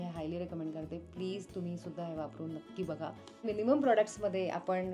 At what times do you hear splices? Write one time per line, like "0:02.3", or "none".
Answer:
0:03.4